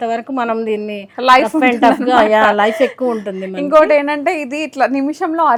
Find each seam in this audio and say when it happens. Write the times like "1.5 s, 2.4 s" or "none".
none